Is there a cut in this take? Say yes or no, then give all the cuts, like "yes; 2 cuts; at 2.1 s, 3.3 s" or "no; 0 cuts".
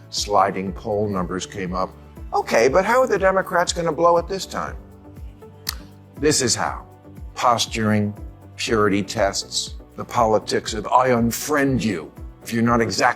no; 0 cuts